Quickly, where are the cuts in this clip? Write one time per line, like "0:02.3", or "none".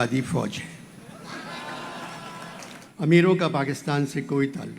0:02.8

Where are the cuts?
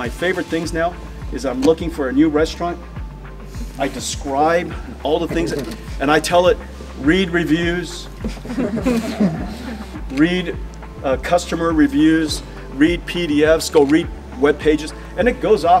none

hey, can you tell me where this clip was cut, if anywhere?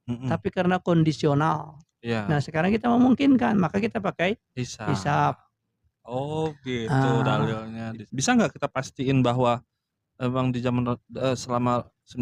0:08.0

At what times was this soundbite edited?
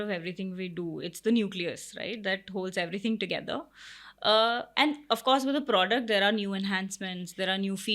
none

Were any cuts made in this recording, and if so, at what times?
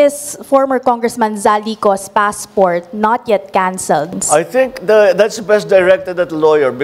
0:04.1

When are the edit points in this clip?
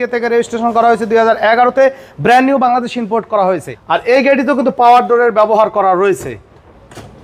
0:03.7

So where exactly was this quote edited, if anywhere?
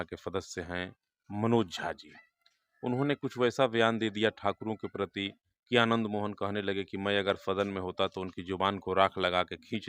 none

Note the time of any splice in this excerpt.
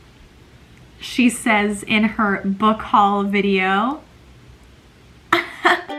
none

